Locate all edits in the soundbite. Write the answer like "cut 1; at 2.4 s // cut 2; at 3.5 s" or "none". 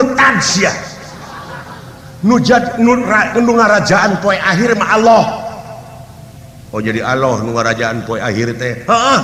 none